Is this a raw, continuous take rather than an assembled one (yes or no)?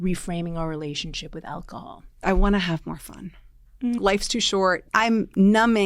no